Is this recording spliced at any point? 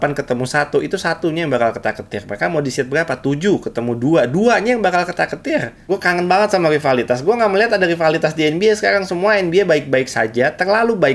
yes; 1 cut; at 5.8 s

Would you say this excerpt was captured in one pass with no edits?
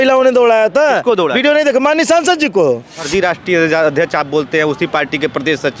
no; 1 cut; at 3.0 s

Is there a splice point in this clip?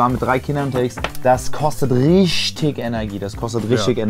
no; 0 cuts

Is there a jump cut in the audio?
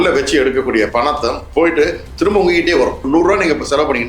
yes; 1 cut; at 3.0 s

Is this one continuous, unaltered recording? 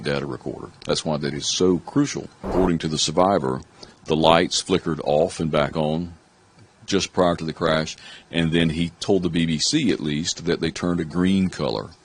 no; 1 cut; at 2.5 s

